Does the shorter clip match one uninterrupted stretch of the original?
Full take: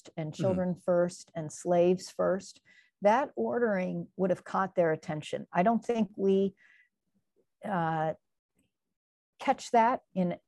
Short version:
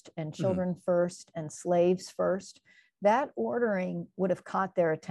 yes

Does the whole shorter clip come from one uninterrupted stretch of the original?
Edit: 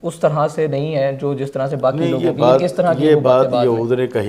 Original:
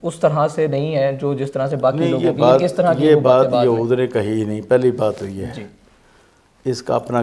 yes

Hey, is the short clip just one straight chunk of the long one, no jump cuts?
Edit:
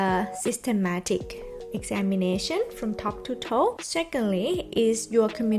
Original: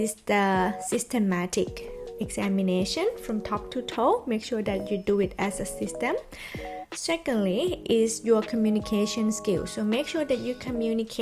no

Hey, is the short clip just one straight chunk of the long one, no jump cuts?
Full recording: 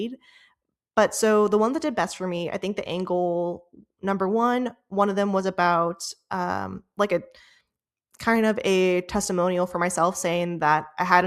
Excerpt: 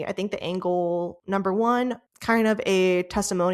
no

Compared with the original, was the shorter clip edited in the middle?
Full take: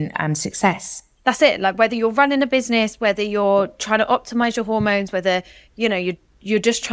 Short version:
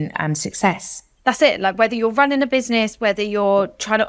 no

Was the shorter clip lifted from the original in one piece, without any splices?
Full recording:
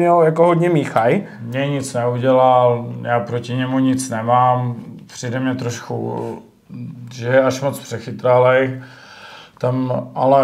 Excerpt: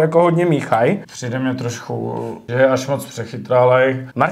no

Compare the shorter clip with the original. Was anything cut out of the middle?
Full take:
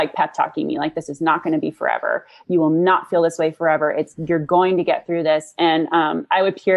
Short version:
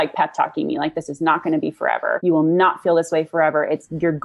yes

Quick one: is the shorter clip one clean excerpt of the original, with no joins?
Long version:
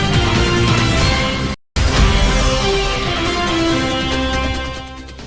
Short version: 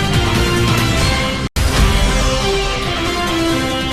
no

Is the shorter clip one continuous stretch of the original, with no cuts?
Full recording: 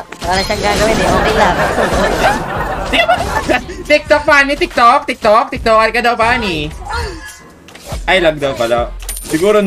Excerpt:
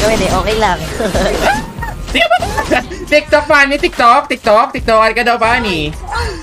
yes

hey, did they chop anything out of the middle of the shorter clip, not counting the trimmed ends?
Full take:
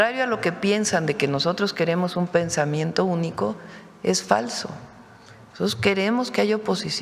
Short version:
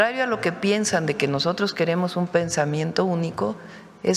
no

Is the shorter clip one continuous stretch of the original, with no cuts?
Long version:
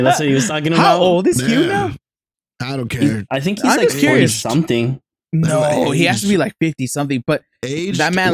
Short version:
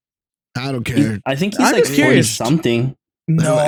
yes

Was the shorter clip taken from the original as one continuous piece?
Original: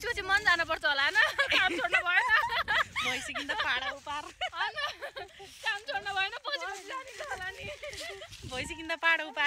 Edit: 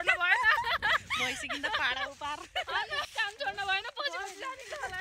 no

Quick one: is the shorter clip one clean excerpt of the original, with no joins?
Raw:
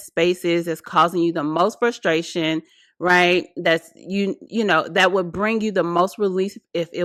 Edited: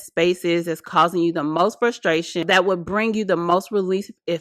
no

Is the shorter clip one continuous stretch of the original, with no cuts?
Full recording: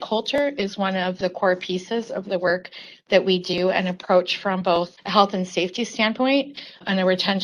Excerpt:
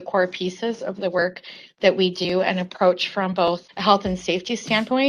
yes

